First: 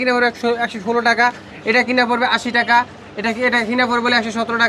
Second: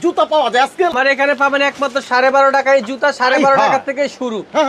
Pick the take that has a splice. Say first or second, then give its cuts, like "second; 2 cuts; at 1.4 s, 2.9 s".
second; 1 cut; at 1.1 s